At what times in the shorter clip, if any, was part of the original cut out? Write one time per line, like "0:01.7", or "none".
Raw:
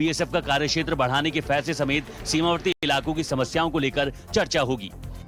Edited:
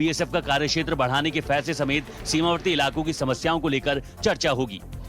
0:02.7